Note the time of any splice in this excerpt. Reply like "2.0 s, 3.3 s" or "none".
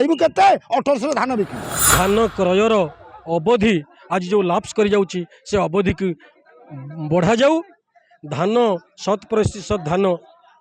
1.8 s